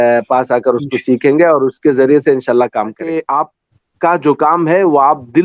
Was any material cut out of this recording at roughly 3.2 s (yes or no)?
yes